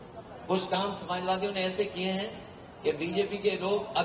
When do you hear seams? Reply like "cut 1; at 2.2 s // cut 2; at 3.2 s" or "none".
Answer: none